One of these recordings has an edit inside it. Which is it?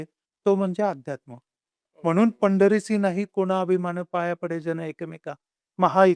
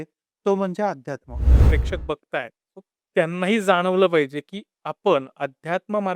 second; 1 cut; at 1.5 s

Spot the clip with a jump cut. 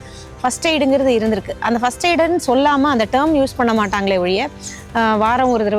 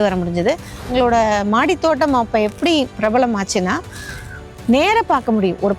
second; 1 cut; at 0.9 s

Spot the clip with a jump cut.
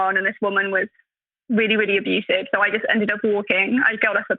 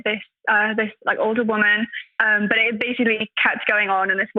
second; 1 cut; at 2.2 s

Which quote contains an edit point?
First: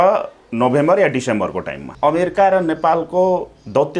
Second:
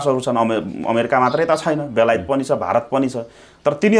first; 1 cut; at 1.9 s

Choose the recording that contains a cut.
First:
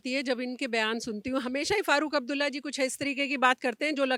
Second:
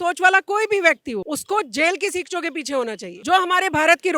second; 2 cuts; at 1.2 s, 3.1 s

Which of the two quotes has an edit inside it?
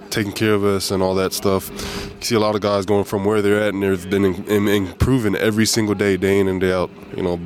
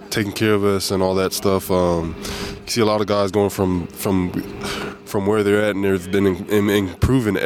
first; 2 cuts; at 1.6 s, 3.1 s

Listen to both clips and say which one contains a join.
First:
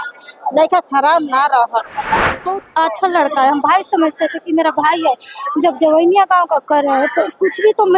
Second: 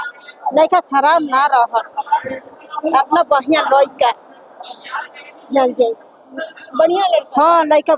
first; 1 cut; at 2.6 s

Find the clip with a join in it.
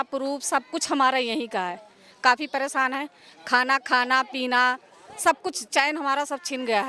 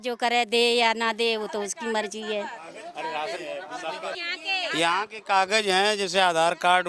second; 1 cut; at 4.2 s

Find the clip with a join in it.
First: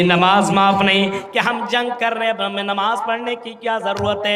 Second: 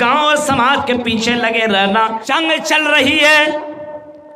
second; 1 cut; at 2.2 s

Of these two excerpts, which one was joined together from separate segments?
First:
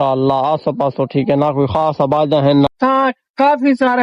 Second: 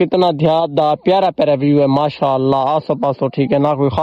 first; 1 cut; at 2.7 s

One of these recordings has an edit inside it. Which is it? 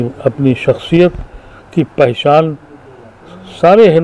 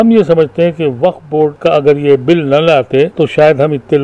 second; 2 cuts; at 1.6 s, 3.1 s

